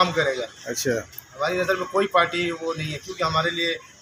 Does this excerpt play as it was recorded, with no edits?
yes; 0 cuts

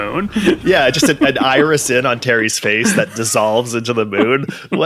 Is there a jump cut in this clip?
no; 0 cuts

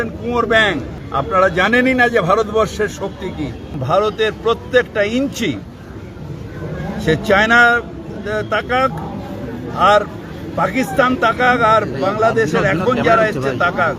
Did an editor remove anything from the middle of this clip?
yes; 2 cuts; at 1.0 s, 3.7 s

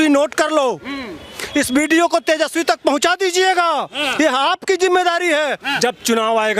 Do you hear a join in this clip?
yes; 1 cut; at 5.7 s

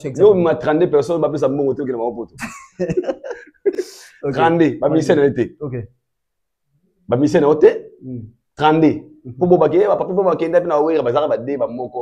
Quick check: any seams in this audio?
no; 0 cuts

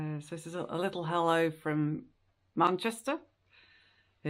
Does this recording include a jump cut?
no; 0 cuts

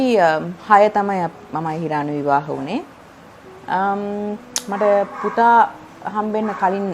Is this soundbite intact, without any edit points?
yes; 0 cuts

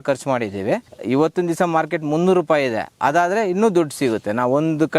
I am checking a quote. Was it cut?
yes; 1 cut; at 0.9 s

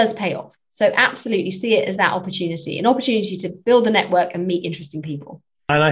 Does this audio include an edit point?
no; 0 cuts

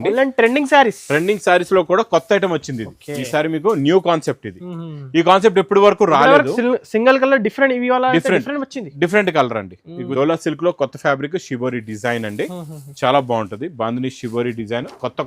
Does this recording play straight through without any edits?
no; 1 cut; at 10.0 s

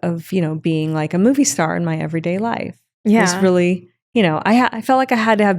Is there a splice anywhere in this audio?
no; 0 cuts

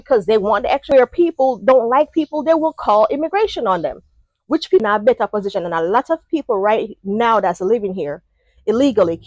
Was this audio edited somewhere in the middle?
yes; 2 cuts; at 0.9 s, 4.8 s

